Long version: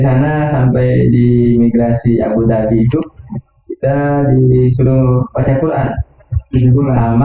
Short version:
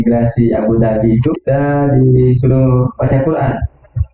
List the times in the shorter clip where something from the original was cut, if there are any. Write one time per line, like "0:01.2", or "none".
0:01.4

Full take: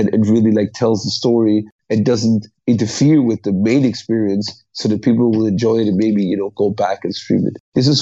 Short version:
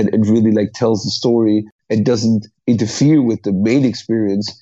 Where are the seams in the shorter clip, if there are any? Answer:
none

